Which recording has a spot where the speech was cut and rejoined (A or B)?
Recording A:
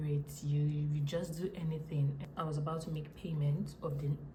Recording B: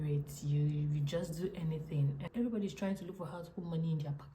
B